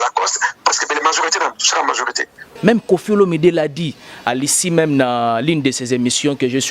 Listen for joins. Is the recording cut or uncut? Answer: cut